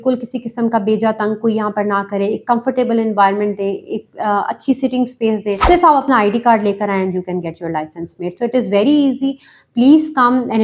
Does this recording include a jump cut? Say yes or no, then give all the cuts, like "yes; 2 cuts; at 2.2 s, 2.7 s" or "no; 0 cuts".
yes; 1 cut; at 5.6 s